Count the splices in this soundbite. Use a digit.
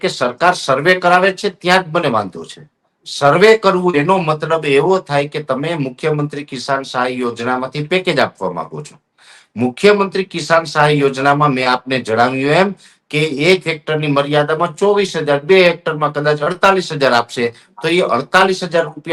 0